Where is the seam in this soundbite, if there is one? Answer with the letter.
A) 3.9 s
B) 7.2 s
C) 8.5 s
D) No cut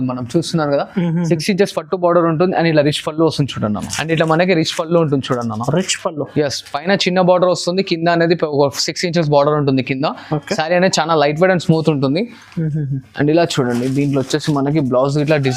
A